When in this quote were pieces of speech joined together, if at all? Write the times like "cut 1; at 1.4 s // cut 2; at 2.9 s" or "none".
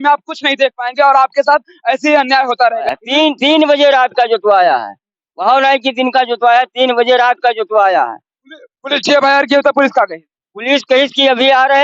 cut 1; at 2.8 s